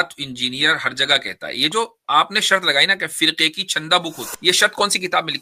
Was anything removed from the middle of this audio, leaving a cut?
yes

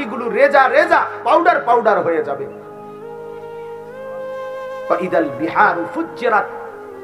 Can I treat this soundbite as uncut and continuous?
no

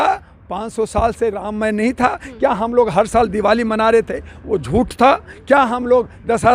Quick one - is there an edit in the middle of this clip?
no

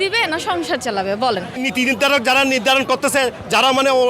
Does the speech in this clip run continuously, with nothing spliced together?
no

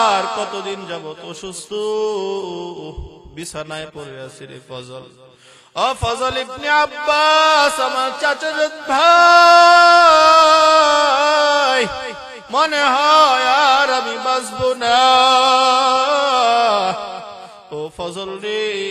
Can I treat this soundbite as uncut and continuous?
yes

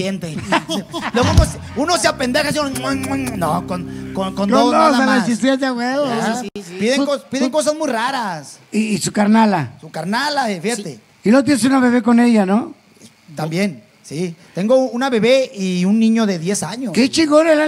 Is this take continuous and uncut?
yes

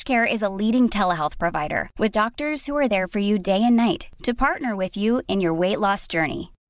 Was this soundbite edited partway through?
no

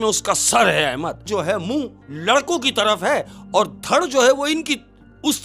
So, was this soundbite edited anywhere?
yes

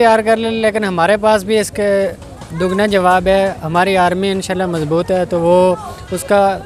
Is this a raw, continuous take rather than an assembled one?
yes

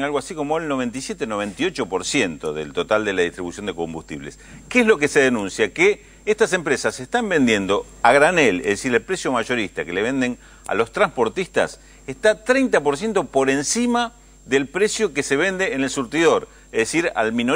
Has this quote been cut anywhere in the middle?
no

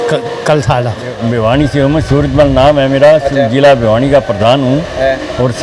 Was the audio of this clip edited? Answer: yes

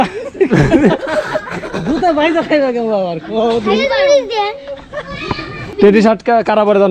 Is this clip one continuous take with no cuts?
no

